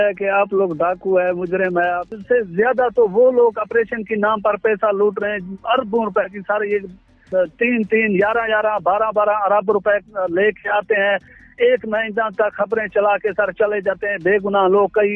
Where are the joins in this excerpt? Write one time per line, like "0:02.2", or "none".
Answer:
0:02.1
0:07.2
0:11.3